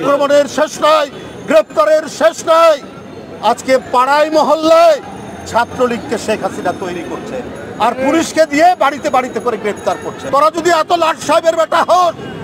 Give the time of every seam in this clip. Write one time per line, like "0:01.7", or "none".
0:10.1